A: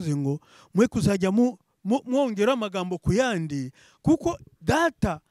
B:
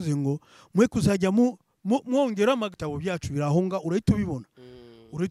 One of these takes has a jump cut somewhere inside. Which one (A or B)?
B